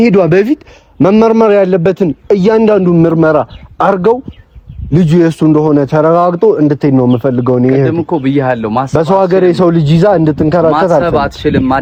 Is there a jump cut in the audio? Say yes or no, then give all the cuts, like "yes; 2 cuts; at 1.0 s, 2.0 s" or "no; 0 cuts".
no; 0 cuts